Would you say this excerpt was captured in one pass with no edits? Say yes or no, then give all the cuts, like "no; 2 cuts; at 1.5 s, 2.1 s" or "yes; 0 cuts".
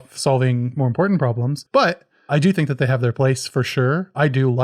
no; 1 cut; at 1.5 s